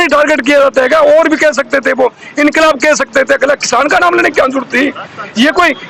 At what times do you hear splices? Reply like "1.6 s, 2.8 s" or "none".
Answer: none

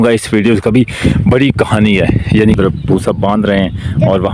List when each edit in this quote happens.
2.5 s

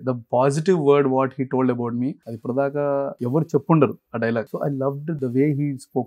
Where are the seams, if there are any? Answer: 2.3 s, 3.2 s, 4.5 s

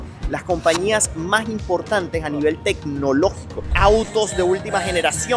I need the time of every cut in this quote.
3.7 s

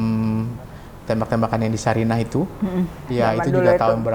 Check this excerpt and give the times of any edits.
3.1 s

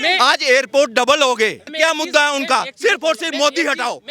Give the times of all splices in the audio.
1.7 s

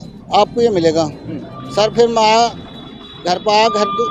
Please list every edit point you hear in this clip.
none

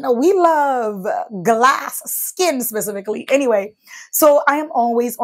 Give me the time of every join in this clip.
none

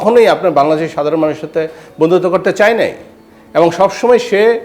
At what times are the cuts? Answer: none

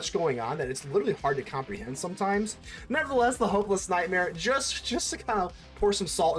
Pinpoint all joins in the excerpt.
2.6 s

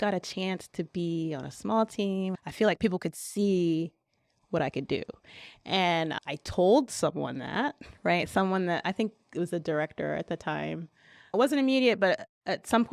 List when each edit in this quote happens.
2.4 s, 6.1 s, 11.3 s

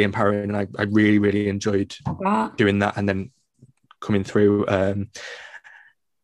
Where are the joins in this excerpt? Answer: none

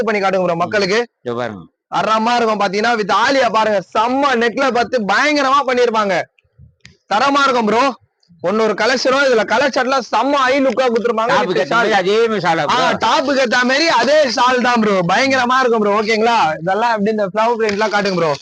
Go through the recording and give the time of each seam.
none

